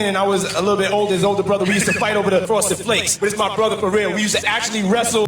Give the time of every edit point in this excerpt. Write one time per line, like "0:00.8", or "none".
0:02.4